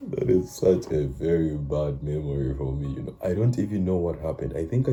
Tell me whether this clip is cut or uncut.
uncut